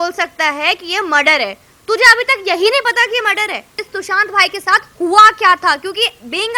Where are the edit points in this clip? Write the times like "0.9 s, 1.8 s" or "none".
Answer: 3.7 s